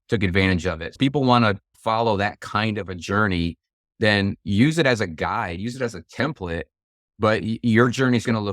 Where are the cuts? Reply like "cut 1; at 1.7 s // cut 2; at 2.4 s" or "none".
none